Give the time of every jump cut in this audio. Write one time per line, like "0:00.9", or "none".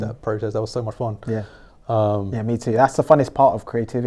none